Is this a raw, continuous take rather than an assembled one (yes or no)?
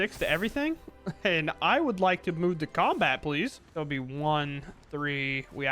no